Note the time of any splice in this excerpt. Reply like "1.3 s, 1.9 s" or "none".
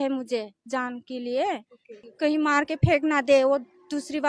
2.0 s